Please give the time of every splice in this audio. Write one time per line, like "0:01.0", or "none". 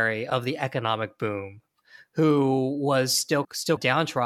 none